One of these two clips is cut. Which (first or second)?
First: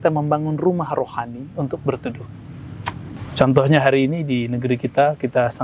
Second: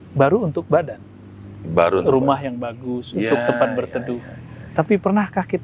first